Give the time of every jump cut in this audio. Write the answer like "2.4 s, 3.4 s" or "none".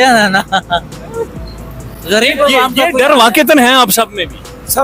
none